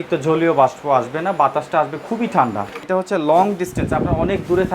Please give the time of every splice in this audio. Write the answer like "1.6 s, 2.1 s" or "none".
2.8 s